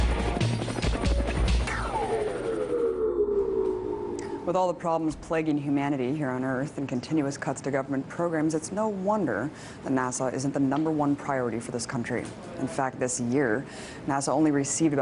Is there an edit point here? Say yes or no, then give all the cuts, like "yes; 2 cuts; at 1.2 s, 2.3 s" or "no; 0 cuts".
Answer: no; 0 cuts